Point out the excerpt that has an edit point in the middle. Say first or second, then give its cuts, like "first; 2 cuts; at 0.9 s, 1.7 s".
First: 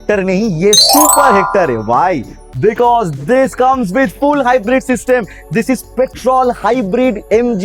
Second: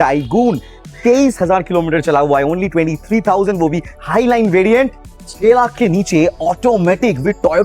second; 1 cut; at 5.1 s